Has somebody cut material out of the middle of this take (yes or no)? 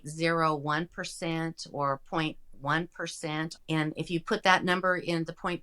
yes